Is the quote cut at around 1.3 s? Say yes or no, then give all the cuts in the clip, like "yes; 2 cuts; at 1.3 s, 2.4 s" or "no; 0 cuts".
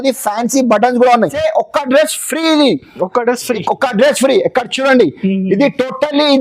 yes; 1 cut; at 1.3 s